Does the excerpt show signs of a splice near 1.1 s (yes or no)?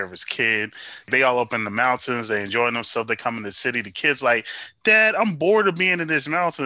yes